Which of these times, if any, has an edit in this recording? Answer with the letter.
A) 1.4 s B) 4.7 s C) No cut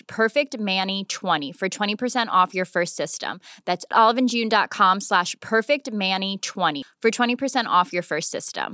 A